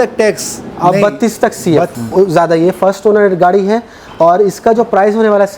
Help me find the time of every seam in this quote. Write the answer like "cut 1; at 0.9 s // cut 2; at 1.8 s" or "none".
cut 1; at 1.9 s